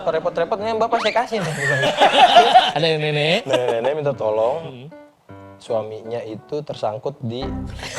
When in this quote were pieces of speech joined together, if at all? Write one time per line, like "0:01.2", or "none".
0:02.7

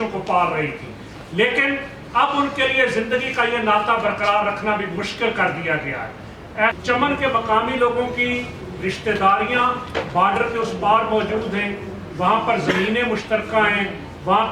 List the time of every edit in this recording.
0:06.7

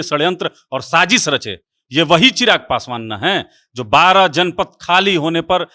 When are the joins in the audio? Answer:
none

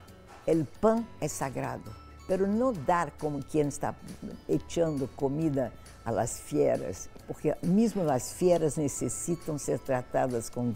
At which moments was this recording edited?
none

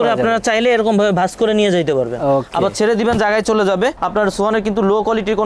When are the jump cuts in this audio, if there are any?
0:04.0

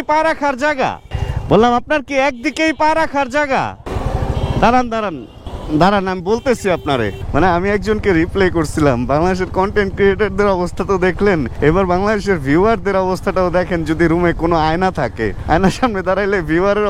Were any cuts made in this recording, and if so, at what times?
0:03.9
0:07.2

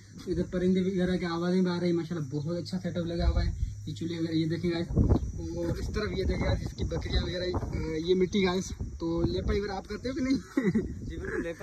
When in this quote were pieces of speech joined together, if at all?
none

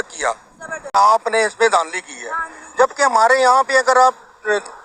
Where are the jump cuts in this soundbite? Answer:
0:00.9

